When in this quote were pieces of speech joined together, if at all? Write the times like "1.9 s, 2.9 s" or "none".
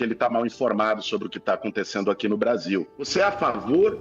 3.0 s